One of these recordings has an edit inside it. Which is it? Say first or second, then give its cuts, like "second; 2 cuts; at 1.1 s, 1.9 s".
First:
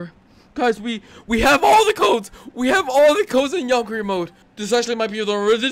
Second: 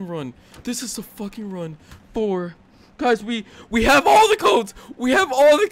first; 1 cut; at 4.4 s